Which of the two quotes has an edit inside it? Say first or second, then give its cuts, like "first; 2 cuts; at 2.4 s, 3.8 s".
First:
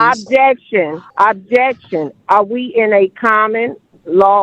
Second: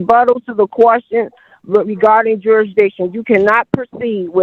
first; 1 cut; at 1.0 s